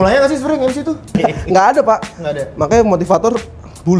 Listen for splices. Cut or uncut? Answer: cut